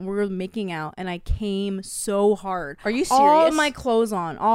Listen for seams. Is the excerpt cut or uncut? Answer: uncut